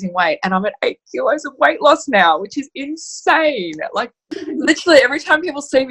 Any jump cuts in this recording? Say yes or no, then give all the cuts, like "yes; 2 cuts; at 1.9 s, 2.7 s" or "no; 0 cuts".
yes; 1 cut; at 4.3 s